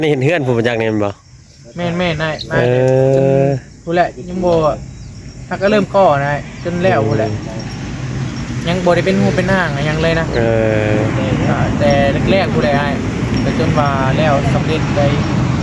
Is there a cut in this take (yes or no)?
no